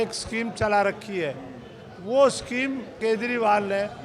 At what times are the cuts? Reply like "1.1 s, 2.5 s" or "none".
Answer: 2.9 s